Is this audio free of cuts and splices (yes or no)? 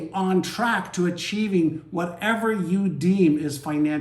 yes